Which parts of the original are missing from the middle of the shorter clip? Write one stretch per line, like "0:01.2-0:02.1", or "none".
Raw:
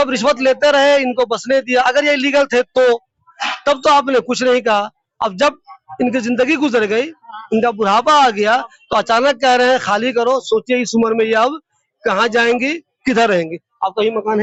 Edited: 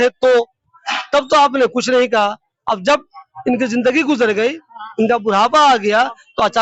none